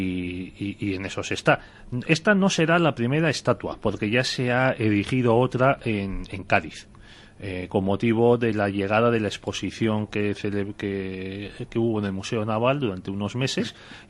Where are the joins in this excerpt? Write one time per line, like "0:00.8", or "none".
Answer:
0:06.2